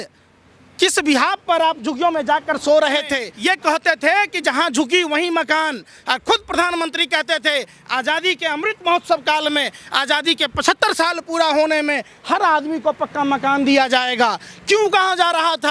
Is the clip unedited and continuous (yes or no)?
no